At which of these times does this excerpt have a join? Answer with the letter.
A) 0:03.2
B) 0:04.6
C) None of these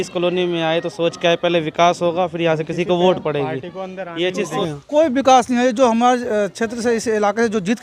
B